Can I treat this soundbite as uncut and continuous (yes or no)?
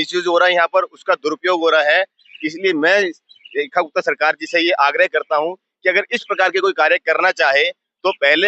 yes